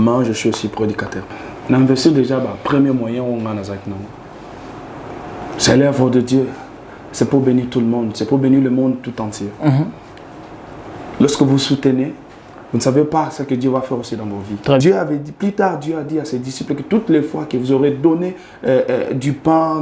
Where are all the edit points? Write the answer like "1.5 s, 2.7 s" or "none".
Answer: 1.4 s, 14.8 s